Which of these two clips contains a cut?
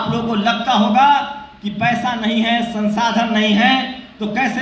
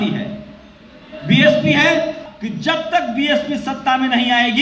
second; 1 cut; at 2.3 s

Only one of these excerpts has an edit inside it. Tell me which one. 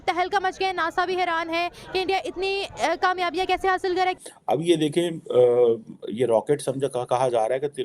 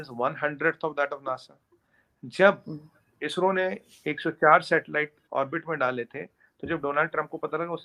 first; 1 cut; at 4.2 s

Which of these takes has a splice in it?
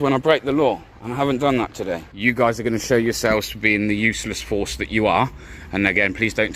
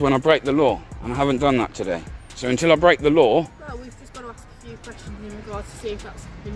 first; 1 cut; at 2.1 s

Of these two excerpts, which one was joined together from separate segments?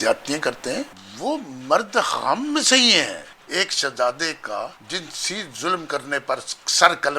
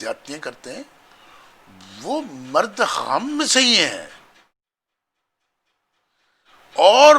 first; 3 cuts; at 1.0 s, 3.3 s, 4.8 s

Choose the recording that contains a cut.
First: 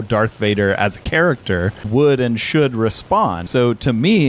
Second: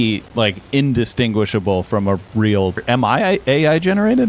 second; 1 cut; at 2.8 s

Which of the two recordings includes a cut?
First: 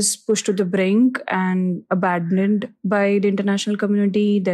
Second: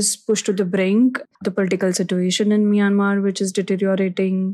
second; 1 cut; at 1.2 s

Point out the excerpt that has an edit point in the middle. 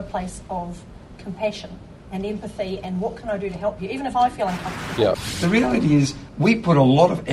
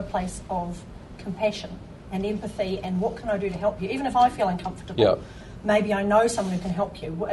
first; 1 cut; at 5.3 s

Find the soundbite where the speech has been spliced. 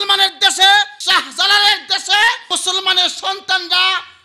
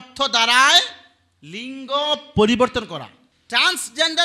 first; 2 cuts; at 1.0 s, 2.6 s

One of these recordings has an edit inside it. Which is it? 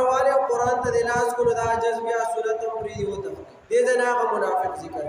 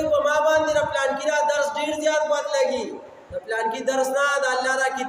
first; 1 cut; at 3.5 s

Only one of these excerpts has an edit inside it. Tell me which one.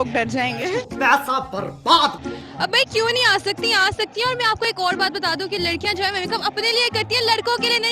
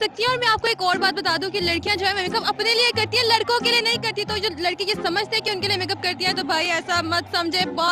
first; 1 cut; at 2.2 s

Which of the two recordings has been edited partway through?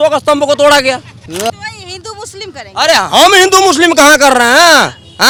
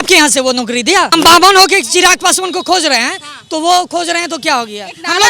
second; 1 cut; at 1.1 s

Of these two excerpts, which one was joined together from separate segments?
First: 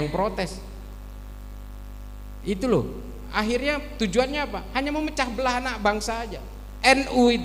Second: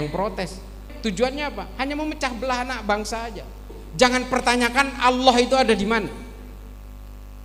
second; 2 cuts; at 0.9 s, 3.7 s

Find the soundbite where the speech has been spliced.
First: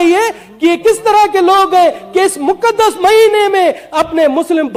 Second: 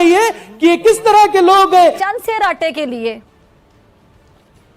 second; 1 cut; at 2.0 s

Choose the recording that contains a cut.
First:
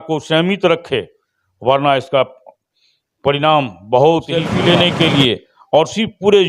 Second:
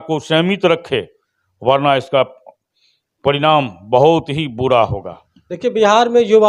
first; 1 cut; at 4.5 s

